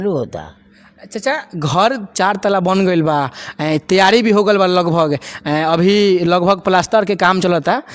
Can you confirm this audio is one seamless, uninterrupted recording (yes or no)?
yes